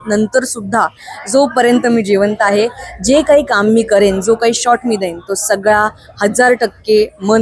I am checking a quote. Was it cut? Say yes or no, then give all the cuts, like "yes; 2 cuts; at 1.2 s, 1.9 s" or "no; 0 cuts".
no; 0 cuts